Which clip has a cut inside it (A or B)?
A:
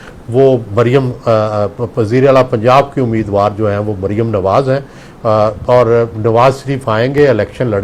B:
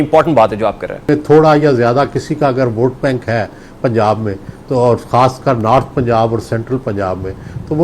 B